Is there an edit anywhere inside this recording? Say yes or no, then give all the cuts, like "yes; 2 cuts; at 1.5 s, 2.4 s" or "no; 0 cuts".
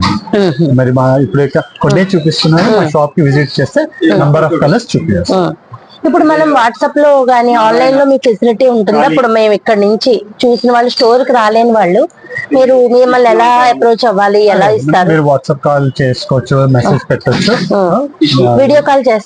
no; 0 cuts